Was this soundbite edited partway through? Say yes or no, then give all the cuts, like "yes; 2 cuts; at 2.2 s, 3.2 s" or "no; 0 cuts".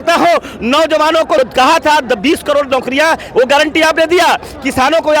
yes; 1 cut; at 1.4 s